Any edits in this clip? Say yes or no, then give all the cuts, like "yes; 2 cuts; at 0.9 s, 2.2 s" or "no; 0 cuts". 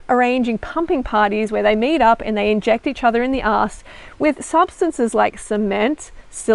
no; 0 cuts